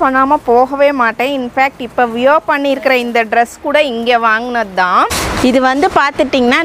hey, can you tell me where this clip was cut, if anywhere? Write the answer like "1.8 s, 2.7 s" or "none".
5.1 s